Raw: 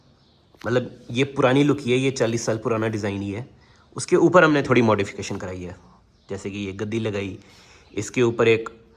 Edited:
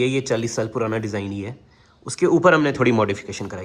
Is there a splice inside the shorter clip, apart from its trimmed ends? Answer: no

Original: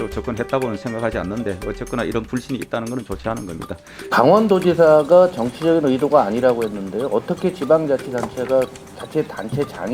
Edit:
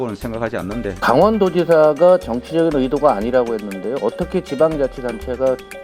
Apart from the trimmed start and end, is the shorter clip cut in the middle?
yes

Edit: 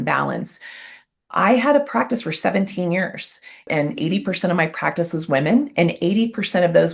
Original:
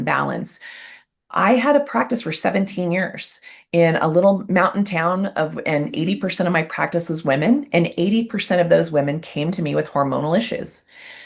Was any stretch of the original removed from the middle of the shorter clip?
yes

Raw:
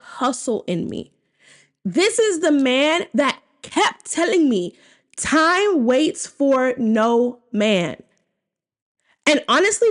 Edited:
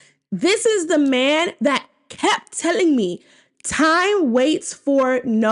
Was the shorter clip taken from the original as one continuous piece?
yes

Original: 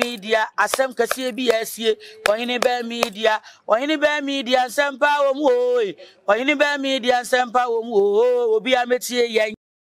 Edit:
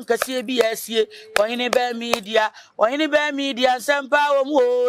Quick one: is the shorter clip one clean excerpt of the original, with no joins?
yes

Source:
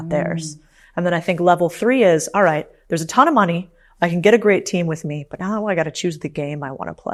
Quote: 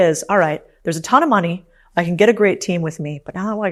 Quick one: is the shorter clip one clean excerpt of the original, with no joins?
yes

